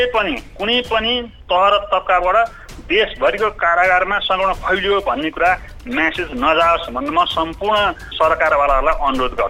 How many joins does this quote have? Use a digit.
2